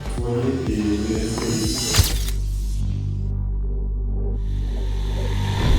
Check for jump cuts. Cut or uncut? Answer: cut